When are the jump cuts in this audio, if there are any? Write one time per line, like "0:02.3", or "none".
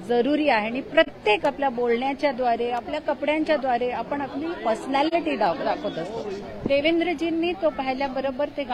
0:06.4